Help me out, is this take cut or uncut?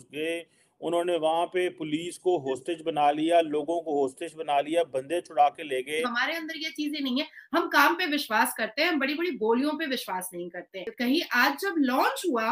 cut